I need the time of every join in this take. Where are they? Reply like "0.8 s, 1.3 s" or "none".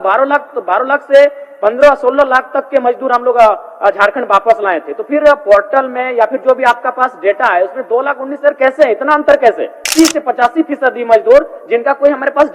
9.8 s